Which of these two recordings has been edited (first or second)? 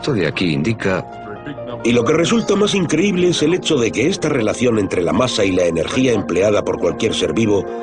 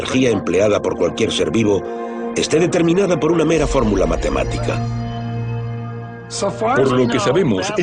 first